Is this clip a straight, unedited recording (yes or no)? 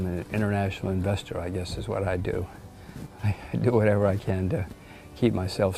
yes